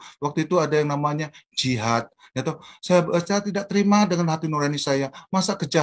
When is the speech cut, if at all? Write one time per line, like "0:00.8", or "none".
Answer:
none